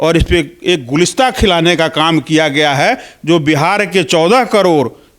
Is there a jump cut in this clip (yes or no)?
no